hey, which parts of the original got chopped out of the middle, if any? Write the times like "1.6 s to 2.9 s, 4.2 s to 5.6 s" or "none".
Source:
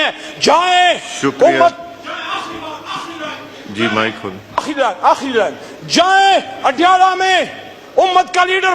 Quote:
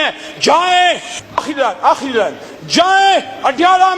1.1 s to 4.3 s